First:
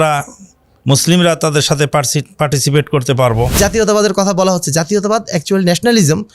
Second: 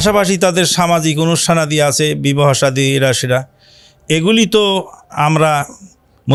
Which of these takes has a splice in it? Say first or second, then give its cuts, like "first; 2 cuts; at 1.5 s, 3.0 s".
first; 1 cut; at 3.5 s